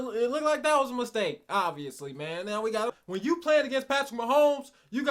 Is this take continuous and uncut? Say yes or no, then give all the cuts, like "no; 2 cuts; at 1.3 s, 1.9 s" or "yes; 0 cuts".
no; 1 cut; at 2.9 s